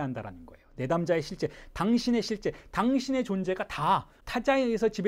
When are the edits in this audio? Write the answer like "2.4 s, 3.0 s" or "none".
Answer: 4.2 s